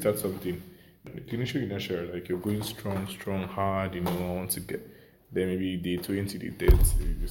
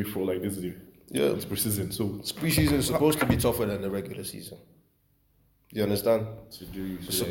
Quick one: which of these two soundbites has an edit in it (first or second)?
first